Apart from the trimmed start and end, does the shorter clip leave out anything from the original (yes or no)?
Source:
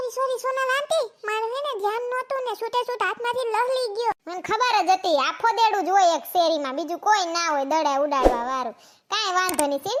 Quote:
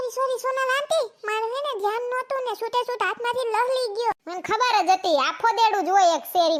no